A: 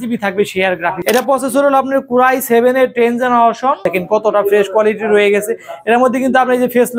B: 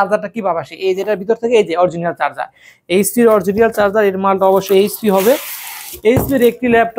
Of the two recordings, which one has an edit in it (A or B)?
A